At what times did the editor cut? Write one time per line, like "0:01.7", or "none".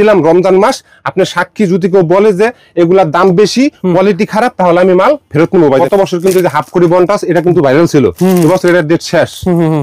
0:05.8

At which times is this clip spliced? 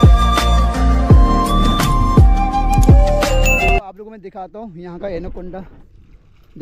0:03.7

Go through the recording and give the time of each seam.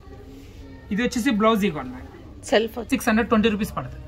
0:02.9

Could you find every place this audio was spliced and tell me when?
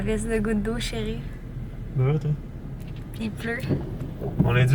none

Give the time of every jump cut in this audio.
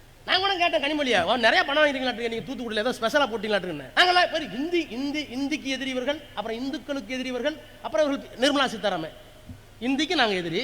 0:03.8

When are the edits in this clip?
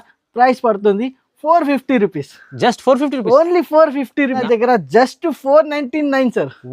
0:04.4

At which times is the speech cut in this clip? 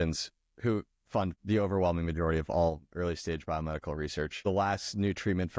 0:01.3
0:04.4

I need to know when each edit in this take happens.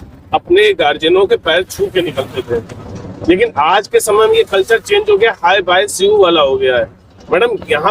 0:06.6

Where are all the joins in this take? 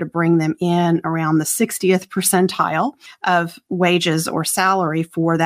0:03.1

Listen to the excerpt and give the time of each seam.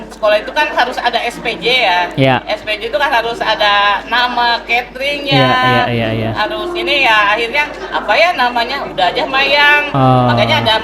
none

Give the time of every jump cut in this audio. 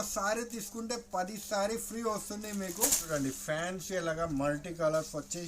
0:03.0

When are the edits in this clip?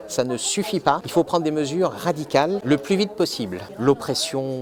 0:01.1
0:02.6
0:03.6

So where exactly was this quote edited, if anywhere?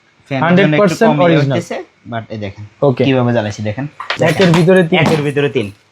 0:04.0

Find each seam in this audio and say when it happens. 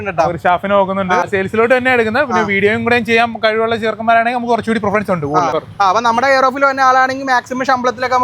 0:01.3
0:05.6

